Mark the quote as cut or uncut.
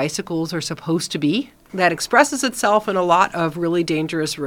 cut